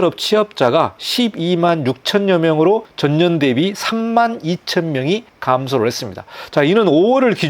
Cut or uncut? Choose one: cut